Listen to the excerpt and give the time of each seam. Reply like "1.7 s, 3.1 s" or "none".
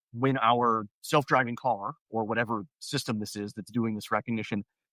none